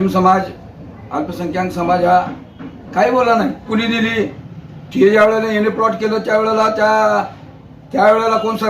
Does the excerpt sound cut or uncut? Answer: cut